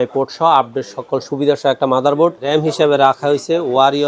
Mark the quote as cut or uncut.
cut